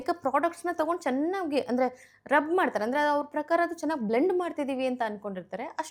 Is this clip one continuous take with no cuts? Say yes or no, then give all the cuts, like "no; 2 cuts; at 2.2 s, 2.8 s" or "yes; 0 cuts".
yes; 0 cuts